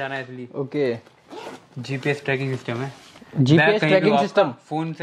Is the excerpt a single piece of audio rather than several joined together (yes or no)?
yes